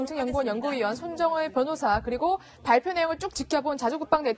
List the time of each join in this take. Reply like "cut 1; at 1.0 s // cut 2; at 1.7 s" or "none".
none